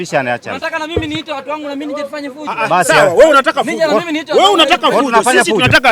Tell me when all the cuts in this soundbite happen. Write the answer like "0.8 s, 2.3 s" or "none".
none